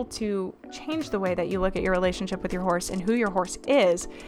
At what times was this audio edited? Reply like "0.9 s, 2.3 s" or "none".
none